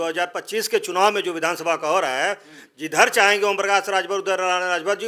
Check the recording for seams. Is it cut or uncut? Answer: uncut